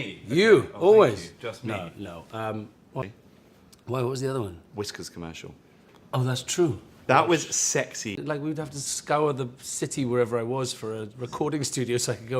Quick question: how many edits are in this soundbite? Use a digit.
2